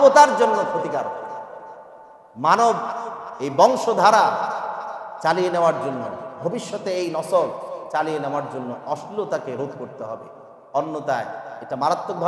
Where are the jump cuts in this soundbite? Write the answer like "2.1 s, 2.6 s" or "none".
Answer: none